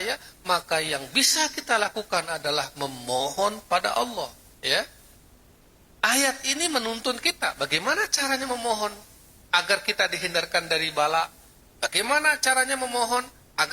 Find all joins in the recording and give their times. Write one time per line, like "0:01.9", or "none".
0:04.5